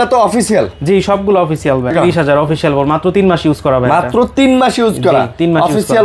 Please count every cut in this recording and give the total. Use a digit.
1